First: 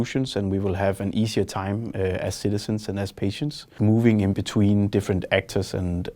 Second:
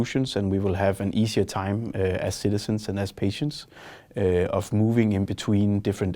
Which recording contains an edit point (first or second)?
first